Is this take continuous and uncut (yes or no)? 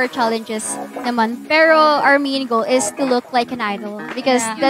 yes